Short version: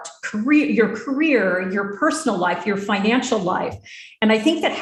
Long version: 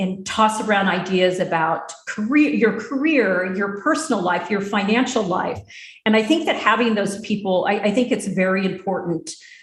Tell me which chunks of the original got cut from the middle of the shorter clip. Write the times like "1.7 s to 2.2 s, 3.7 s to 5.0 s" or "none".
none